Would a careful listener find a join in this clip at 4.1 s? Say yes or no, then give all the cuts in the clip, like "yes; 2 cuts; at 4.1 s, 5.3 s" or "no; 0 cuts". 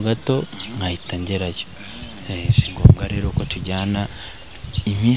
yes; 1 cut; at 4.1 s